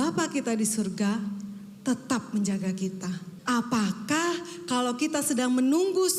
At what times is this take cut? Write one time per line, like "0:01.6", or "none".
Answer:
0:03.3